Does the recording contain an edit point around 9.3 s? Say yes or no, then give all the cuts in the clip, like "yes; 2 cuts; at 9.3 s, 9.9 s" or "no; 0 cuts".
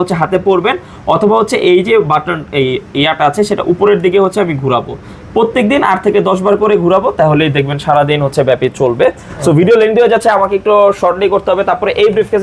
no; 0 cuts